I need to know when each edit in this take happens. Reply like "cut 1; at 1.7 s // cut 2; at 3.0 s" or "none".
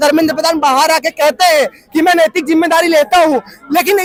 none